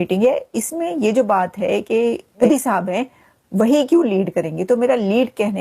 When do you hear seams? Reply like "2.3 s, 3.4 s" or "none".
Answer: 2.4 s